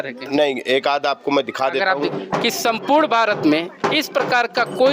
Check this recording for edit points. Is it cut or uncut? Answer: cut